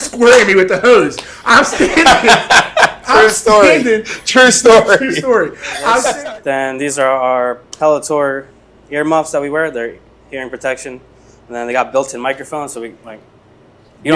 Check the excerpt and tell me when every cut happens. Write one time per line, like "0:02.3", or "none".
0:06.1